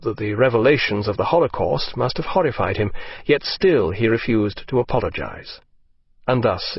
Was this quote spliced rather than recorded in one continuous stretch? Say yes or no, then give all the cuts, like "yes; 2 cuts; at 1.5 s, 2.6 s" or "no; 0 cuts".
yes; 1 cut; at 1.8 s